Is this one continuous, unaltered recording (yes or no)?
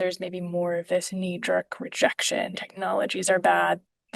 no